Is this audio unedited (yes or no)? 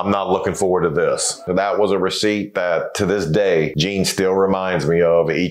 no